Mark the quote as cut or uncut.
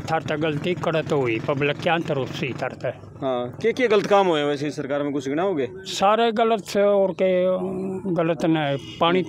uncut